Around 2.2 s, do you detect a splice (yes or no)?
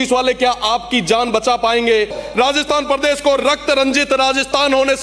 yes